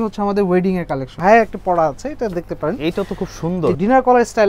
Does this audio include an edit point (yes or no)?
yes